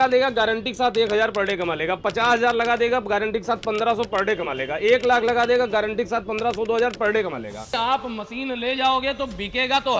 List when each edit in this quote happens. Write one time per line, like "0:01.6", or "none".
0:07.6